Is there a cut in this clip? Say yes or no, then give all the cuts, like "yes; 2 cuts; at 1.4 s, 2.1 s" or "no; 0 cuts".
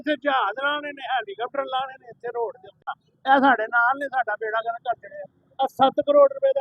yes; 1 cut; at 2.9 s